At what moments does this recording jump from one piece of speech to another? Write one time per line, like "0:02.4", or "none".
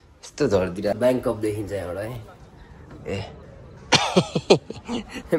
0:01.0

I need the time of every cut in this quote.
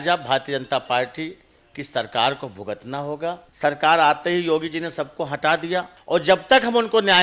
0:03.5
0:06.0

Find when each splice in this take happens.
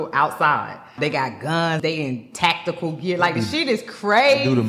0:00.9
0:01.8

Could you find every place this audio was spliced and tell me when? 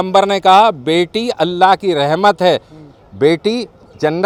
none

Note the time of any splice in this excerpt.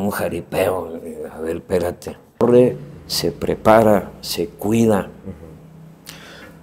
0:02.4

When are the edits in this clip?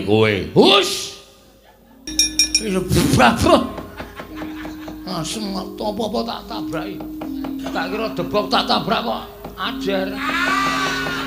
0:02.1

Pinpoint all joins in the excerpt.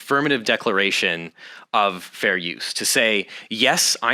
none

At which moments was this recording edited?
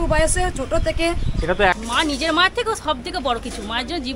0:01.8

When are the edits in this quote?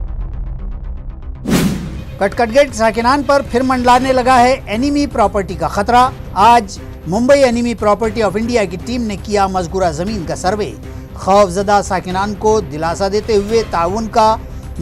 none

